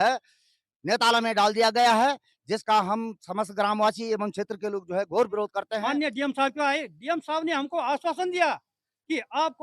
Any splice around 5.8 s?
yes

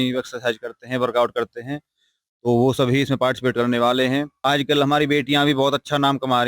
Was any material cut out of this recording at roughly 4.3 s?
yes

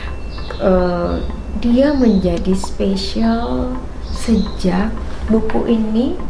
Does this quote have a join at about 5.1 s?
yes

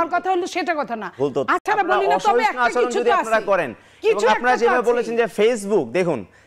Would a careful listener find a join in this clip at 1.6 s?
yes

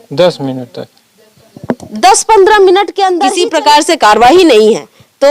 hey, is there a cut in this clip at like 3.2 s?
yes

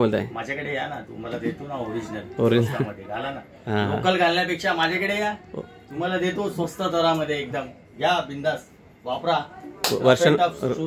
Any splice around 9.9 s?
no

